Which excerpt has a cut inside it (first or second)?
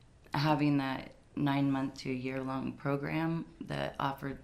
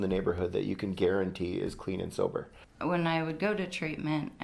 second